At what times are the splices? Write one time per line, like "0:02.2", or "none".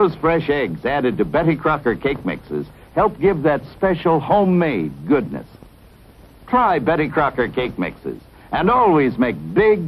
0:02.5